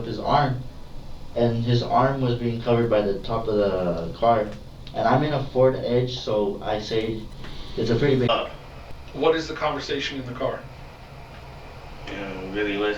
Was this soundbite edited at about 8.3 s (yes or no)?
yes